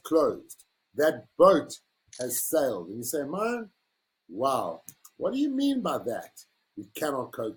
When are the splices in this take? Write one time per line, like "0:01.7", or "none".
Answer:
none